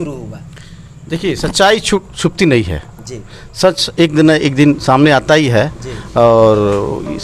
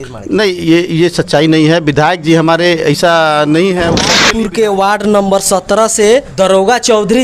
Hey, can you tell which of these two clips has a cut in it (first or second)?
second